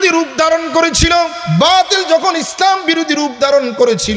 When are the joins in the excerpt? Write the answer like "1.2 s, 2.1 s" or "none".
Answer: 1.4 s

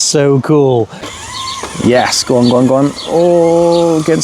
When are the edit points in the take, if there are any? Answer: 1.0 s

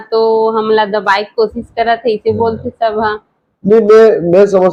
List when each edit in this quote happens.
none

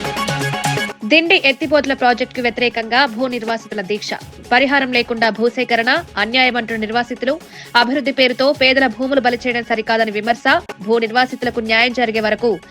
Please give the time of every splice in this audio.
none

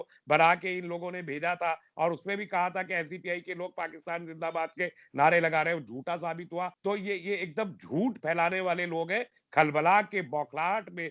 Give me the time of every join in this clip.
6.7 s

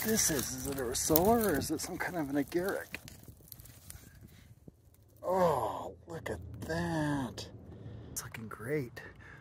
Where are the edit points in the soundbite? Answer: 8.3 s

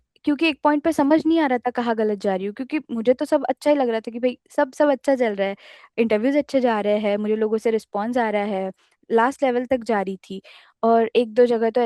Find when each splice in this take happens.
none

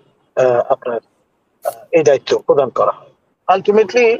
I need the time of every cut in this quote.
3.3 s

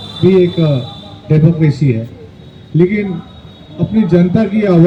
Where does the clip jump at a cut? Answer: none

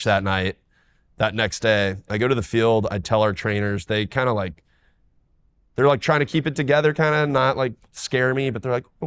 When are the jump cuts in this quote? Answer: none

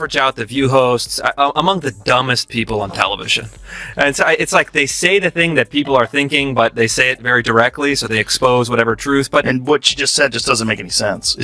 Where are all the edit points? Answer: 9.5 s

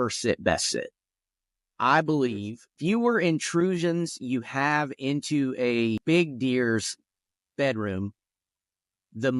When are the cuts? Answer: 2.7 s, 6.0 s

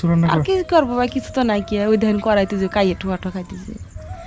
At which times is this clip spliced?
none

